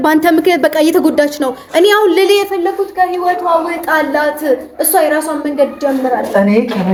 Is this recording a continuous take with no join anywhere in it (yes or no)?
yes